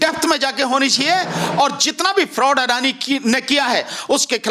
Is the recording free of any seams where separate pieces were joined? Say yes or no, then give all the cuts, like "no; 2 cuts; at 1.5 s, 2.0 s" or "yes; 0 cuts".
yes; 0 cuts